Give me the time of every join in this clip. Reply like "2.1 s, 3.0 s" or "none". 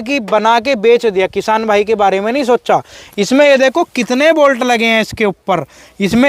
none